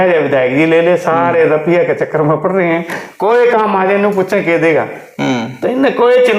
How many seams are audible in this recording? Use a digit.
0